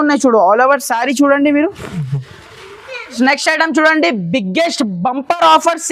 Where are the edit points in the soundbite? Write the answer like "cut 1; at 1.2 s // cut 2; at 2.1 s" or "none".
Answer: cut 1; at 3.1 s